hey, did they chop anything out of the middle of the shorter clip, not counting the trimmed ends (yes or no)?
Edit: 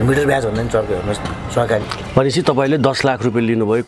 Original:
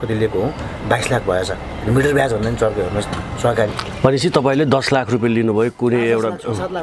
no